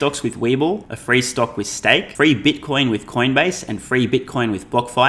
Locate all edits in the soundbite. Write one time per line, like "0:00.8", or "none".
0:00.9
0:02.1